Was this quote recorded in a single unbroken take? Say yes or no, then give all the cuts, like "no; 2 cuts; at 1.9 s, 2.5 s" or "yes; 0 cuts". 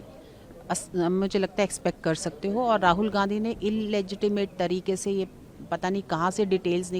yes; 0 cuts